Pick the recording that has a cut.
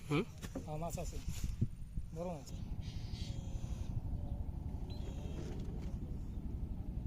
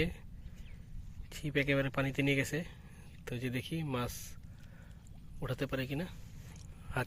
first; 1 cut; at 2.5 s

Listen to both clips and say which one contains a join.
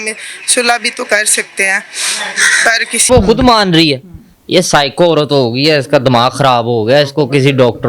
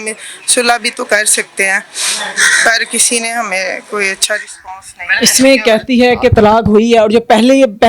first; 1 cut; at 3.1 s

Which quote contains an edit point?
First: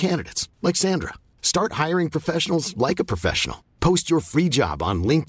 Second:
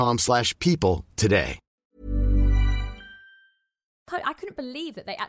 second; 2 cuts; at 1.6 s, 4.1 s

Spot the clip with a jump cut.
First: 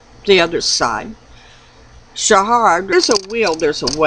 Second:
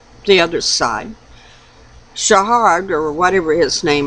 second; 1 cut; at 2.9 s

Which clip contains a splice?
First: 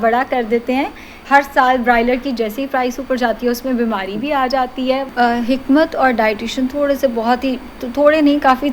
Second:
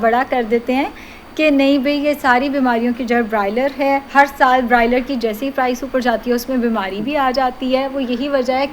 first; 2 cuts; at 1.2 s, 5.1 s

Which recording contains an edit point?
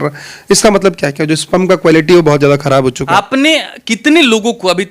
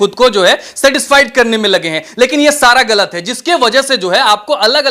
first; 1 cut; at 3.0 s

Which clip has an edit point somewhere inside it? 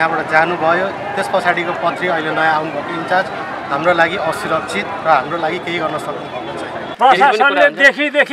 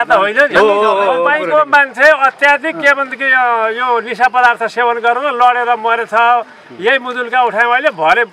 first; 1 cut; at 6.9 s

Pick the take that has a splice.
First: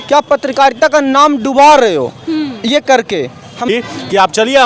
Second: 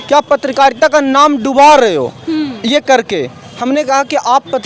first; 1 cut; at 3.7 s

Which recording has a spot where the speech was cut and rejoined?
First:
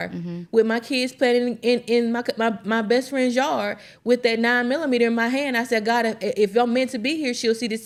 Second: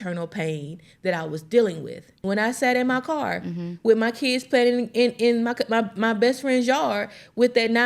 second; 1 cut; at 2.2 s

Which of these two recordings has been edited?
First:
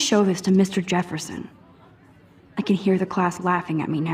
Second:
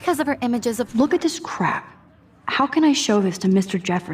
second; 1 cut; at 0.9 s

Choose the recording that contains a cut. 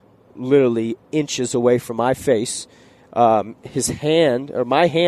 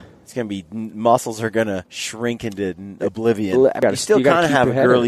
second; 2 cuts; at 2.0 s, 3.8 s

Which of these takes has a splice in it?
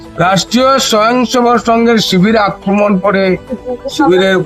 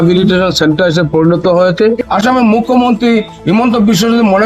second; 1 cut; at 2.0 s

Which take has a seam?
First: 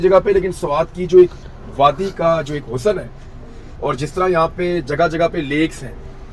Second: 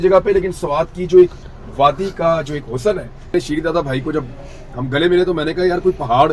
second; 1 cut; at 3.3 s

